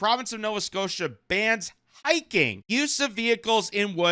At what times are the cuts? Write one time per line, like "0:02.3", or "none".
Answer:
0:02.6